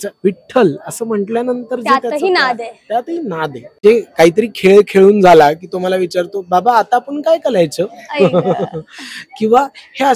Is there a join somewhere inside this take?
yes; 1 cut; at 3.8 s

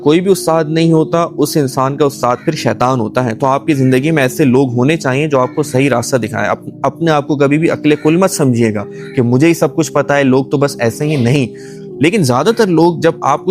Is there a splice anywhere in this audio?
no; 0 cuts

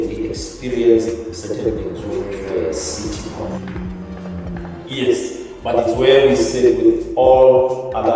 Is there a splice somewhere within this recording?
yes; 1 cut; at 3.6 s

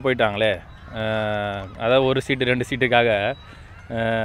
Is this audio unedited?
yes; 0 cuts

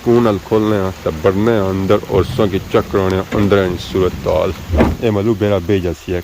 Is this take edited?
yes; 1 cut; at 5.0 s

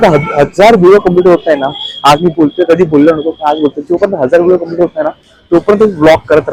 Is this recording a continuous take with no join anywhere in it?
yes; 0 cuts

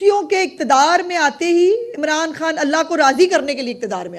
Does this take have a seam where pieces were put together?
no; 0 cuts

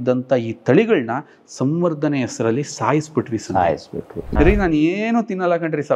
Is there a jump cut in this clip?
yes; 1 cut; at 4.2 s

